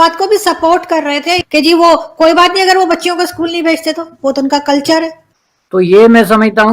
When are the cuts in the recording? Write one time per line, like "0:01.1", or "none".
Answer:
0:05.2

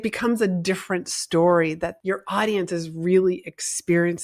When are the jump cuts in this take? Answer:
0:01.9

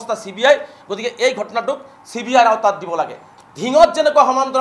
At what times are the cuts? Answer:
0:03.3

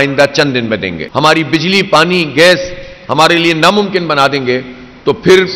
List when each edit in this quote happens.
0:01.0

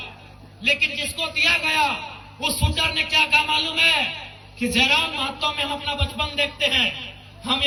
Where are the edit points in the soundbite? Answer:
none

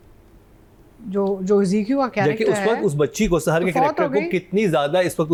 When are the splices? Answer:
none

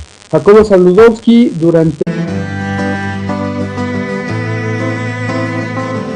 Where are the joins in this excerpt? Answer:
none

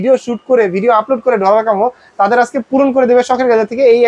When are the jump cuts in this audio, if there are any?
none

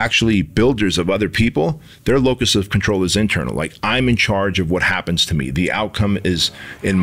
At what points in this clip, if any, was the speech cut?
none

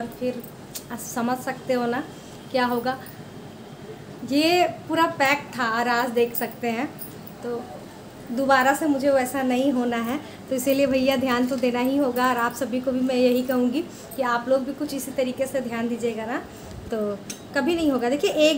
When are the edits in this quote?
none

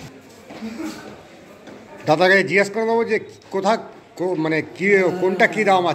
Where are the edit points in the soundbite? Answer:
0:01.9

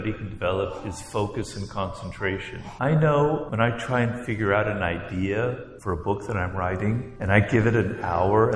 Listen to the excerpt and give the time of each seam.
0:02.6
0:03.4
0:05.7
0:07.1

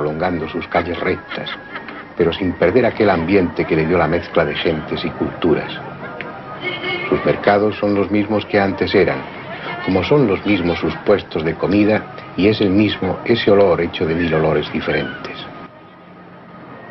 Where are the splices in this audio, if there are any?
none

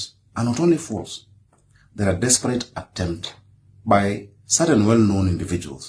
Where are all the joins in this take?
none

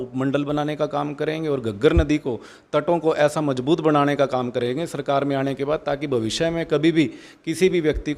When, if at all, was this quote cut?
none

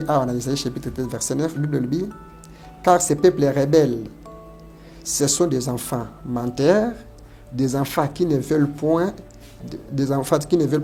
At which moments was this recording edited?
none

